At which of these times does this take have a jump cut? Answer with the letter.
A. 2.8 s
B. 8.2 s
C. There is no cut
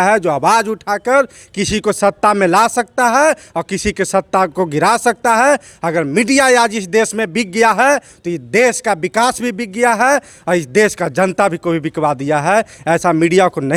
C